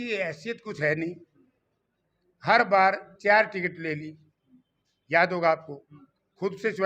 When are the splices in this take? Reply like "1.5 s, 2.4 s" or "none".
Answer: none